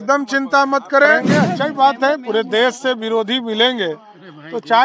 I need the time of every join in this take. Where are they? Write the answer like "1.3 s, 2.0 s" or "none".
1.5 s